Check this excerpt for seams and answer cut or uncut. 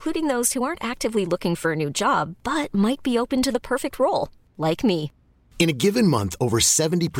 uncut